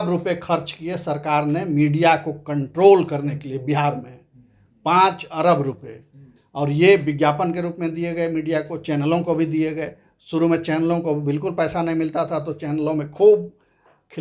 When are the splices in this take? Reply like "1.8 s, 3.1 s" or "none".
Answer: none